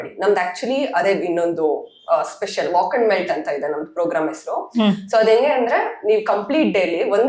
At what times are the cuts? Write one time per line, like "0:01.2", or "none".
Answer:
none